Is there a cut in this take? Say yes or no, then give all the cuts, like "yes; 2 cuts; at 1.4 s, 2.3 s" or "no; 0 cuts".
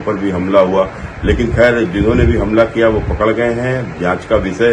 no; 0 cuts